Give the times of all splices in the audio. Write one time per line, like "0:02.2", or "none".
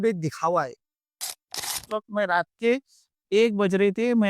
0:01.4